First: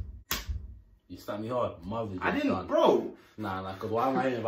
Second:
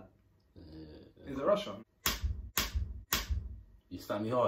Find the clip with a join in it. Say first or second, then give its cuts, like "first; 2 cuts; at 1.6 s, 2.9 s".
second; 1 cut; at 1.8 s